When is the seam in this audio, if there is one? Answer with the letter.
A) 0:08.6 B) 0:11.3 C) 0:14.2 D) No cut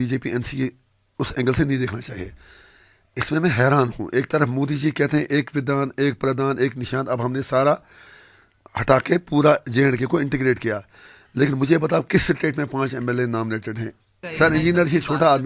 C